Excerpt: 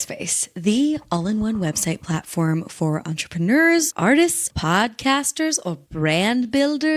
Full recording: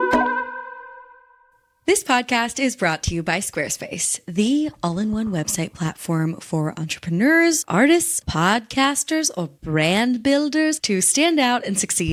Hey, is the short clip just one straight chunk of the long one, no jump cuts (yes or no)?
yes